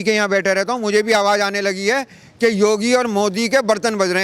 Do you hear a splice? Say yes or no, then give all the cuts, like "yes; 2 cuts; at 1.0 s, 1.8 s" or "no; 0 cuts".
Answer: no; 0 cuts